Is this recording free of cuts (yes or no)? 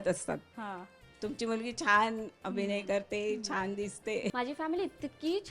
no